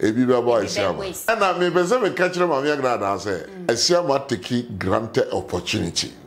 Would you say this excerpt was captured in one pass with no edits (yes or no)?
no